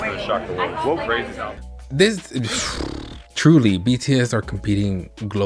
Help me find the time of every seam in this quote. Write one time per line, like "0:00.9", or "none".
0:01.5

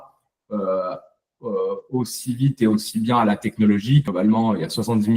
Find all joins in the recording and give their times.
0:04.0

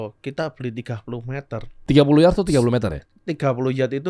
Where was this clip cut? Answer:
0:01.8

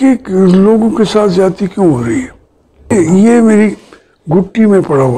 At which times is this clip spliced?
0:02.9

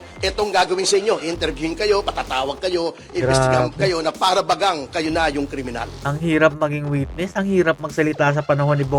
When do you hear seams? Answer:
none

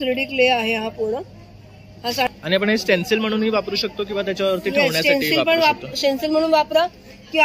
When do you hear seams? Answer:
0:02.3

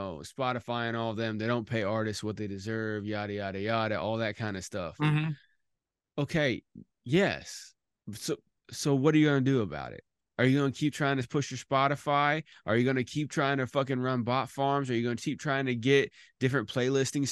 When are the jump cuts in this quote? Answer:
none

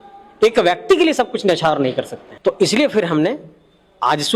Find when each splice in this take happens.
0:02.2

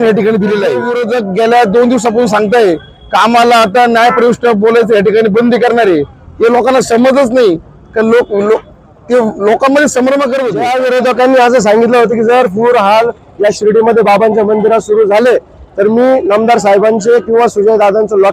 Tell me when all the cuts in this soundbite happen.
0:00.9
0:10.6

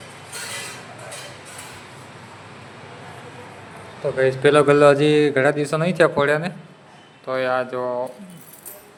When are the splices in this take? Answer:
none

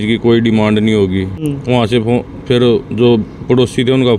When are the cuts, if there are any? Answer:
0:01.4

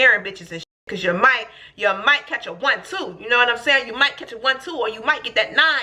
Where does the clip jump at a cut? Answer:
none

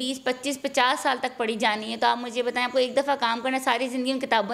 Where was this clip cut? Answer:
none

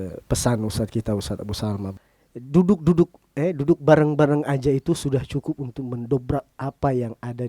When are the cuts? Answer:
0:02.0

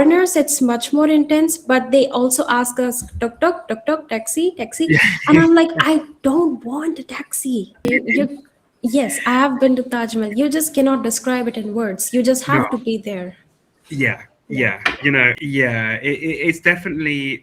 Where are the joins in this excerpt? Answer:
0:07.9
0:15.4

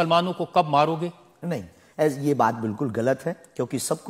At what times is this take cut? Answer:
none

